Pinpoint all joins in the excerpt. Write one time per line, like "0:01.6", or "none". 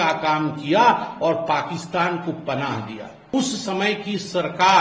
0:03.3